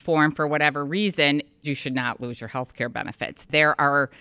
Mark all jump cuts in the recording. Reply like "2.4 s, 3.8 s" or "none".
1.6 s, 3.5 s